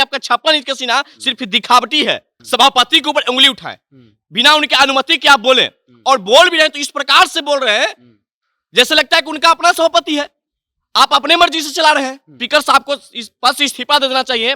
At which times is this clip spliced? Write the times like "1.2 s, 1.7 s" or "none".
2.3 s, 12.4 s